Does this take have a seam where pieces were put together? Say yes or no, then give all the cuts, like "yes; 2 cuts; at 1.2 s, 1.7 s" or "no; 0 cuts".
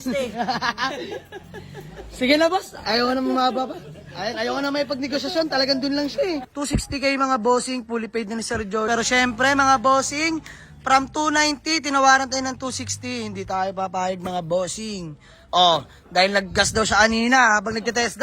yes; 2 cuts; at 6.5 s, 8.9 s